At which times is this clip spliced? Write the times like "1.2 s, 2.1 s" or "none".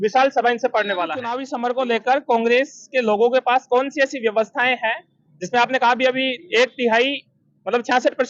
1.4 s